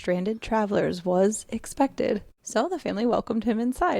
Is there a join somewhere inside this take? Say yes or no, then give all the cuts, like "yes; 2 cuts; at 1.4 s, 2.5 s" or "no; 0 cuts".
yes; 1 cut; at 2.3 s